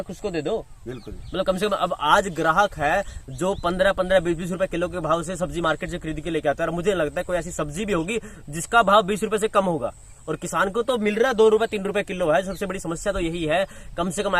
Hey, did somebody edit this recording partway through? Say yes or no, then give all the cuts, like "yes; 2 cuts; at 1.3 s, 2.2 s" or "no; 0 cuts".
no; 0 cuts